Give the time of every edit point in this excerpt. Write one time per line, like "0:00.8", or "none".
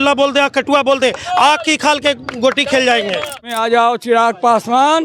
0:03.6